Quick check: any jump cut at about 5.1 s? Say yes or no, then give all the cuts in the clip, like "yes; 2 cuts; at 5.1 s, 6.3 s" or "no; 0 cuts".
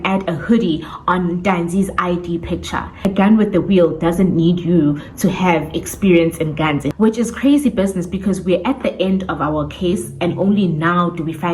no; 2 cuts; at 3.0 s, 6.9 s